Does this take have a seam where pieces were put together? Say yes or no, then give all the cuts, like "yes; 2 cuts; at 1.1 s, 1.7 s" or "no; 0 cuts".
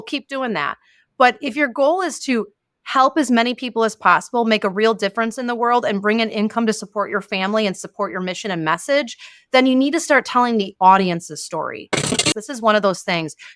yes; 1 cut; at 12.3 s